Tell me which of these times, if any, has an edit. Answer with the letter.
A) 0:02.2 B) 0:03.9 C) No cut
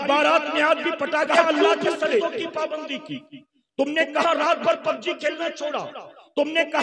A